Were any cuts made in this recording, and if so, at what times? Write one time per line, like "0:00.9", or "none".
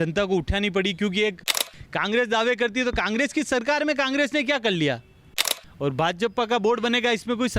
0:01.7
0:05.6